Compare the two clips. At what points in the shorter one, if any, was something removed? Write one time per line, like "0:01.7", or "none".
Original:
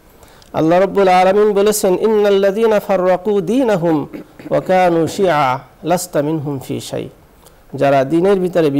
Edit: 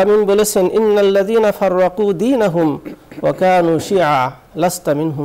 none